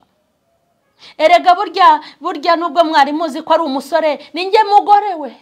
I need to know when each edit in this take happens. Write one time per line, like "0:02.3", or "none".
none